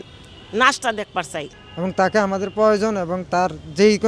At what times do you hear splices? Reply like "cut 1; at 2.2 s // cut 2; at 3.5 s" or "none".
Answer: cut 1; at 1.6 s